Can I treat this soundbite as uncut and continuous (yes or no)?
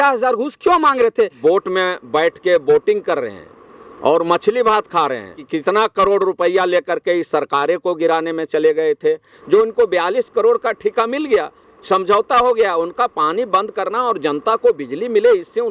no